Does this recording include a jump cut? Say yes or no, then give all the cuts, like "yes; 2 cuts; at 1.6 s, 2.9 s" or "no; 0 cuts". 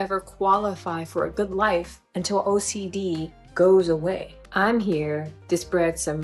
yes; 1 cut; at 4.4 s